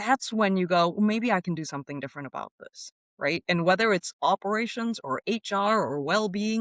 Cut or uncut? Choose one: uncut